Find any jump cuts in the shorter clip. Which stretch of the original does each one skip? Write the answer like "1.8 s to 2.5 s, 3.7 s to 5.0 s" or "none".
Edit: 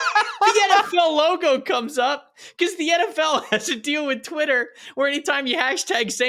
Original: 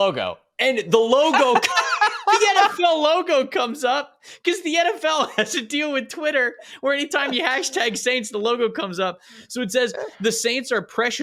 none

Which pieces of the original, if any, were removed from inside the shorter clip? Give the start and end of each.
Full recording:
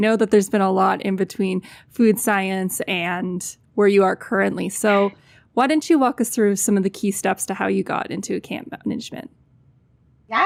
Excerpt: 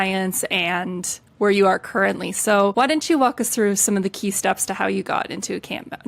5.1 s to 5.5 s

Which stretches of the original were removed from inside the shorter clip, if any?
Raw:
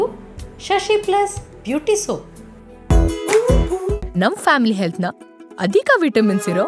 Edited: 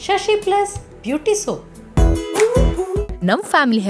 2.4 s to 2.7 s

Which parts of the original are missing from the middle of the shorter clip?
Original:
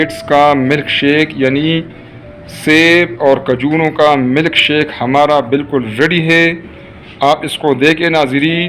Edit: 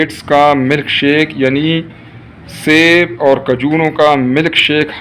none

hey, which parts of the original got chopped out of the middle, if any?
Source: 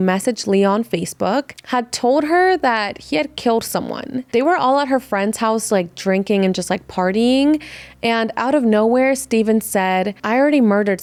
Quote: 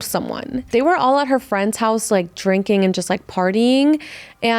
none

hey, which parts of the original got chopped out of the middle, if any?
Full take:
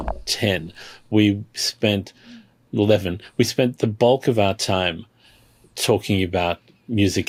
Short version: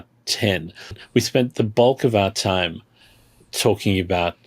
0.9 s to 3.2 s

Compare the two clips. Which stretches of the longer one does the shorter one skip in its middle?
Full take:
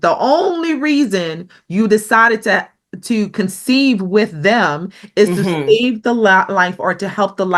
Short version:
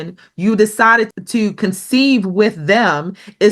2.4 s to 2.9 s

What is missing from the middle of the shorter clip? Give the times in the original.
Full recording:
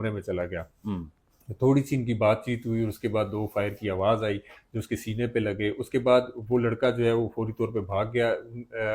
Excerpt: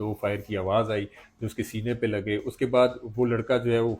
none

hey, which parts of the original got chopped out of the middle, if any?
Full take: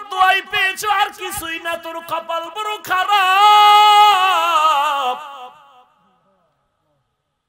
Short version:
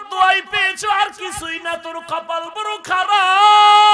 none

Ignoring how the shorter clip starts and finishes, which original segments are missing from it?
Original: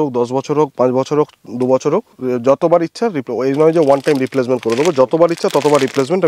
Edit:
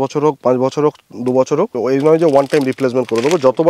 2.1 s to 3.3 s

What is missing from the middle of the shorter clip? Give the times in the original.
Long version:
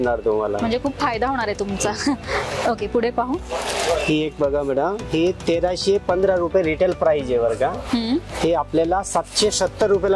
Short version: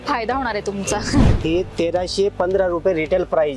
2.3 s to 5.0 s

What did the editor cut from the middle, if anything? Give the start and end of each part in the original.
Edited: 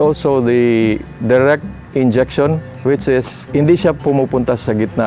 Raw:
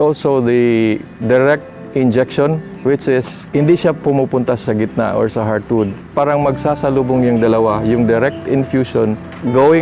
none

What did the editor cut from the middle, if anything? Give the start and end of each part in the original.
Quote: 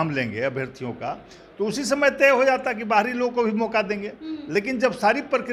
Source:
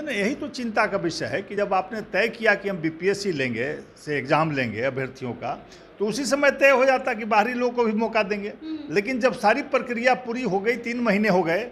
none

